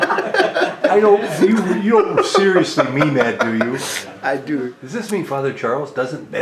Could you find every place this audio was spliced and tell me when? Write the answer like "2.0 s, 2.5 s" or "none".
4.8 s